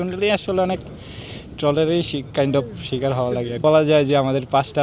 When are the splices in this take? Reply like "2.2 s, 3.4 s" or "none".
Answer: 3.5 s